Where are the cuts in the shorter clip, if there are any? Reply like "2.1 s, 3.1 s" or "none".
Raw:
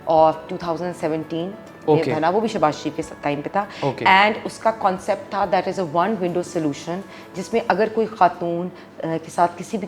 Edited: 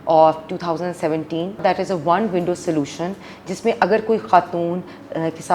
1.6 s

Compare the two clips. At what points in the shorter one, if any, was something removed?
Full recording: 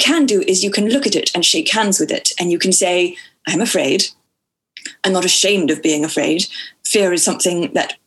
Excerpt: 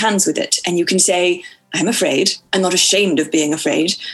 2.4 s

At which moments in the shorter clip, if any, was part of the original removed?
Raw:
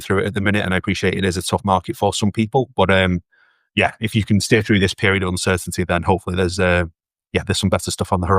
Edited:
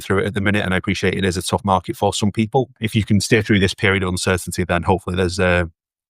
2.7 s

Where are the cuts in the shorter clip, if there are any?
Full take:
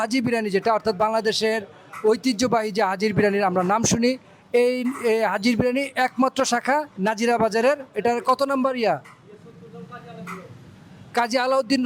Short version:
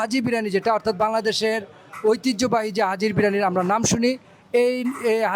none

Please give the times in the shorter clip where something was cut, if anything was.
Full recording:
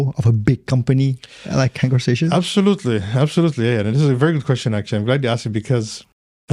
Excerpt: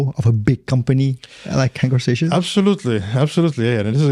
none

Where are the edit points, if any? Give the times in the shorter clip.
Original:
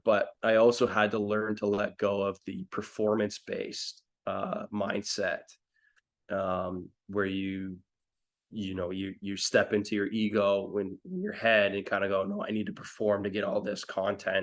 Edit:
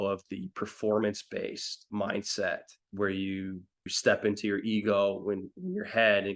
1.9 s, 2.8 s, 3.9 s

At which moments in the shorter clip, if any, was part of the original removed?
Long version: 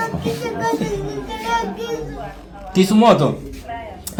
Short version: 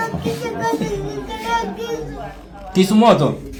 none

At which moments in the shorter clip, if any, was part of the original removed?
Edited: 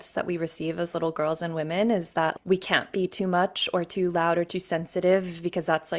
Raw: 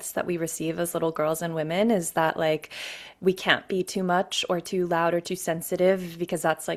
2.4 s

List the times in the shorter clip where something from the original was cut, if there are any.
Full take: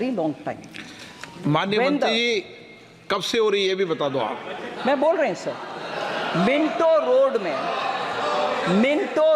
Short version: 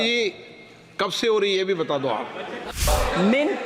2.7 s

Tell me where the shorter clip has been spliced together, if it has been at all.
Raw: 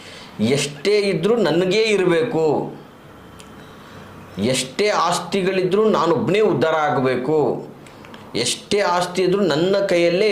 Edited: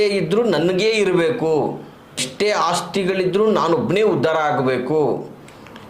2.3 s

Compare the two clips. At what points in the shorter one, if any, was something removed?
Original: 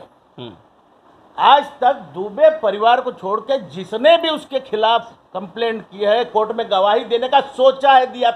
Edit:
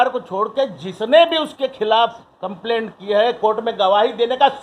none

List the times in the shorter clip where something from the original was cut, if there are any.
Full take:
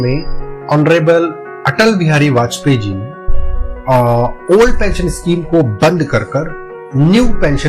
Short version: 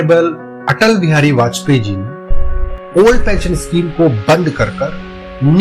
2.8 s

